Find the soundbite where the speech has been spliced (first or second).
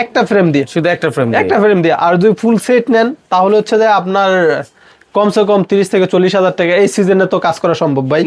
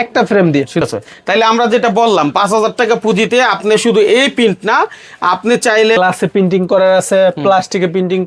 second